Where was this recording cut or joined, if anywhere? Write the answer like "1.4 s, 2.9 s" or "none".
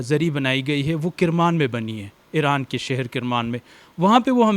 none